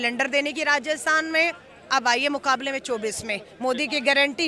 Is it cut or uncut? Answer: uncut